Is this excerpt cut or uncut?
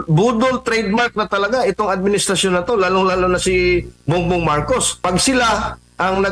cut